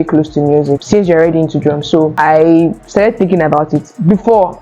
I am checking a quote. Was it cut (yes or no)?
yes